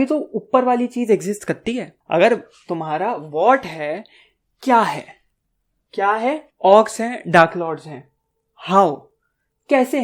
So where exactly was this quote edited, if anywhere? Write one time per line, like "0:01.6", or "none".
0:01.9
0:06.5